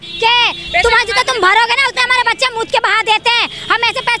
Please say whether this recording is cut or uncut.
uncut